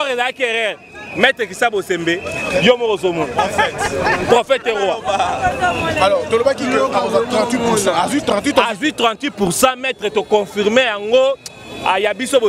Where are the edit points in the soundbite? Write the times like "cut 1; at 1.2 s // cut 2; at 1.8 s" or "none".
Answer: none